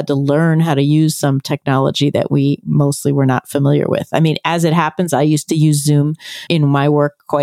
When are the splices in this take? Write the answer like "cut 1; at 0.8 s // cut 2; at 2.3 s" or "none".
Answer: cut 1; at 6.5 s